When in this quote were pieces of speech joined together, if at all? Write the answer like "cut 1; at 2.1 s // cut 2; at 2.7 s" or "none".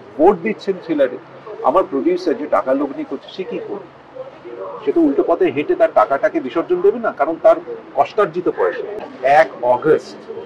cut 1; at 9.0 s